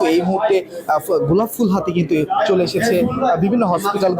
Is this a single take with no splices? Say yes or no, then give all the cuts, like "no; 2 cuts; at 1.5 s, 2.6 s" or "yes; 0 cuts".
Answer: yes; 0 cuts